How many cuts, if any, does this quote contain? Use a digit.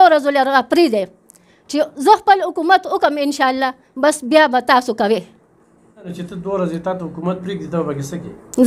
1